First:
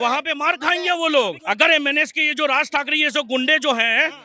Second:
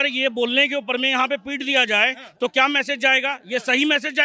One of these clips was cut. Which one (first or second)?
first